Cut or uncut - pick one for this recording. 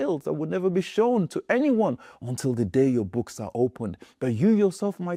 uncut